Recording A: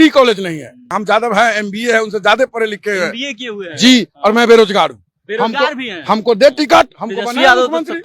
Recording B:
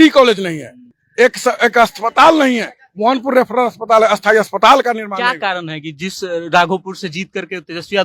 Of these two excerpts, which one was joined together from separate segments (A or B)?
A